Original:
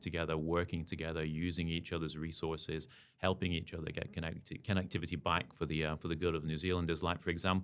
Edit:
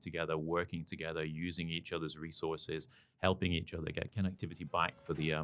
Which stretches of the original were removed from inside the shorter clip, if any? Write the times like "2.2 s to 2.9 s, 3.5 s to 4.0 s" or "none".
4.1 s to 4.6 s